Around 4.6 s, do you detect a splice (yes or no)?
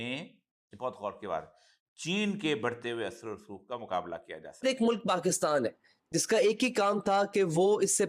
yes